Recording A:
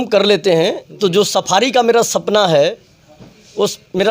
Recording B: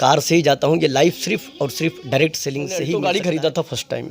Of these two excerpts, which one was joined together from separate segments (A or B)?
B